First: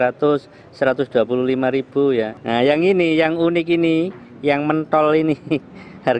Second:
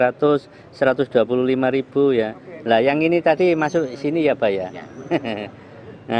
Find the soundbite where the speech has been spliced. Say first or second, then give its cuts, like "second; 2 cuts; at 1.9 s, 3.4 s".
first; 1 cut; at 2.4 s